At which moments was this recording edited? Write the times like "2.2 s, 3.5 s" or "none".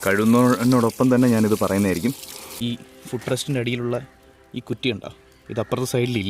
2.5 s